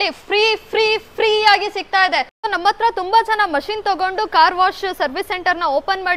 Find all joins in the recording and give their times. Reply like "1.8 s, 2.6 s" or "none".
2.4 s